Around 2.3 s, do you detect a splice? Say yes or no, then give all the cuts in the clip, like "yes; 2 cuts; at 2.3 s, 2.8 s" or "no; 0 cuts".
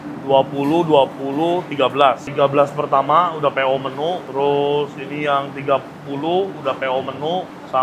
no; 0 cuts